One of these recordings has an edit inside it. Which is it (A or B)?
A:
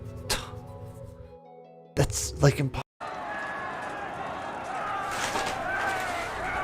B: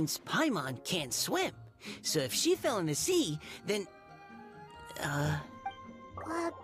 A